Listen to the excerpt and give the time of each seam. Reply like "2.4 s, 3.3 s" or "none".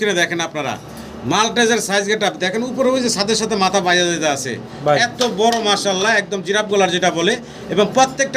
none